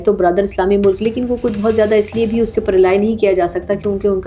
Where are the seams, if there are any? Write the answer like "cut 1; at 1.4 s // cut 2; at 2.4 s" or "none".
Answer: none